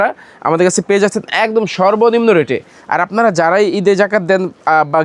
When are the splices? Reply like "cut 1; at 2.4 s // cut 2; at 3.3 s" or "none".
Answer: none